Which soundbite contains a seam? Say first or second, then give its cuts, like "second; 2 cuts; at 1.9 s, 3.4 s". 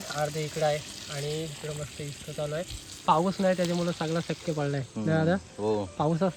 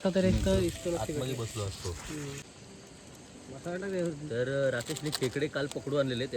second; 1 cut; at 2.5 s